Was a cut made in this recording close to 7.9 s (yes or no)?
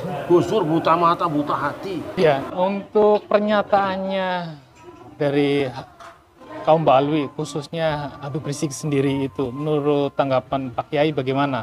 no